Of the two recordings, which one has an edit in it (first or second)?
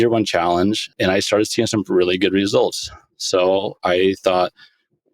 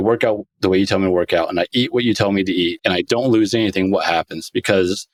first